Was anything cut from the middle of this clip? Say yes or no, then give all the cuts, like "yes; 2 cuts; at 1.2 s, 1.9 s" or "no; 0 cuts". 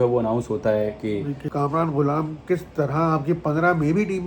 yes; 1 cut; at 1.4 s